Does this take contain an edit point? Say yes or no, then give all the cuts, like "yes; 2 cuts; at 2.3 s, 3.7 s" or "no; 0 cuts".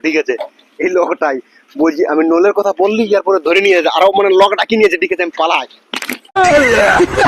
yes; 1 cut; at 6.2 s